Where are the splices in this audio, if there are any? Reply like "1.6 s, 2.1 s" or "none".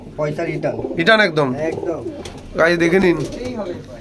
none